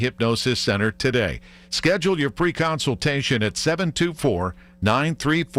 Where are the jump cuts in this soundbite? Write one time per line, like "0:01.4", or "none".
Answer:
none